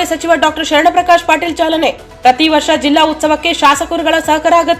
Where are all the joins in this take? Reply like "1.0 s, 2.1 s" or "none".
none